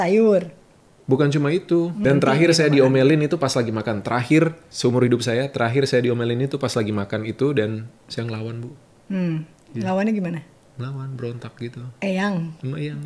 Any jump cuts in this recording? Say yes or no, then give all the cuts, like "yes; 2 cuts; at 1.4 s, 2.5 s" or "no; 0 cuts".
yes; 2 cuts; at 2.0 s, 4.7 s